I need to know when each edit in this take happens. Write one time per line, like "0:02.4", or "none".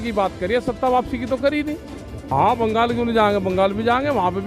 0:02.2